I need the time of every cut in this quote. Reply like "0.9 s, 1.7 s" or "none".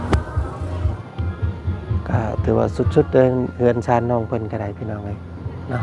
1.0 s